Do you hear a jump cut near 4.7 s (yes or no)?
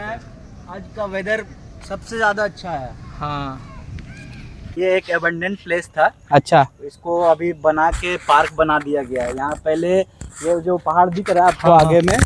yes